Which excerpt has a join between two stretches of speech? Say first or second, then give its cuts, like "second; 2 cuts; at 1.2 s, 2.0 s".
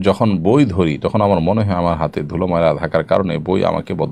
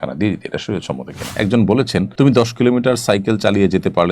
second; 2 cuts; at 1.3 s, 2.1 s